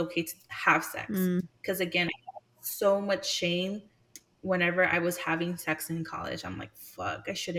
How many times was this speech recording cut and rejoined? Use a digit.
0